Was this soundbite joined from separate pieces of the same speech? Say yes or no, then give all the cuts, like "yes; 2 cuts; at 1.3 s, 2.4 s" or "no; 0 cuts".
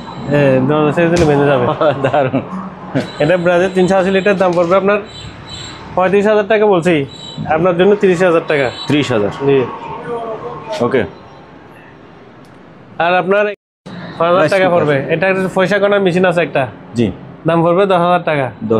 no; 0 cuts